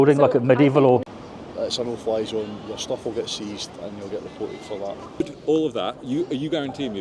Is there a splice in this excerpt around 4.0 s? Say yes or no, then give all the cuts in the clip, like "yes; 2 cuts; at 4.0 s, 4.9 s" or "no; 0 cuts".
no; 2 cuts; at 1.0 s, 5.3 s